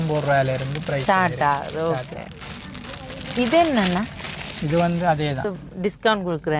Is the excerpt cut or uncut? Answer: cut